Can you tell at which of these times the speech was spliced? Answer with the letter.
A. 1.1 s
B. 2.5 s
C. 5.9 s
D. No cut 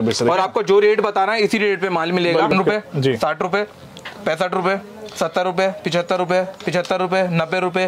B